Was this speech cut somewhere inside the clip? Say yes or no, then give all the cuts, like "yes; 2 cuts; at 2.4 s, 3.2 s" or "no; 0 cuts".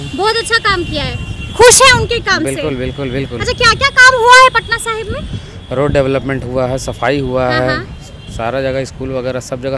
no; 0 cuts